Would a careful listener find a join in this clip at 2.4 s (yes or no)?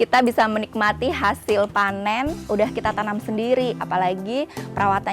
yes